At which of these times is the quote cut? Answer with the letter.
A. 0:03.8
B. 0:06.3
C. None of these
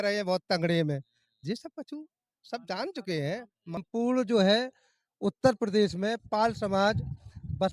A